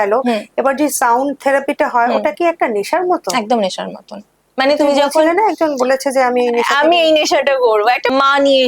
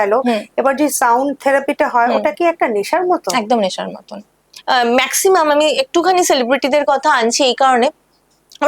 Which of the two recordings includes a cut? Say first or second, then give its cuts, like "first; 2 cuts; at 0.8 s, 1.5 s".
second; 1 cut; at 4.4 s